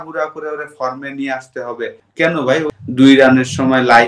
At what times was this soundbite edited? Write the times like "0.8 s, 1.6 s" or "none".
2.0 s, 2.7 s